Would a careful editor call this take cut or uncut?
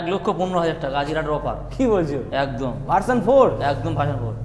uncut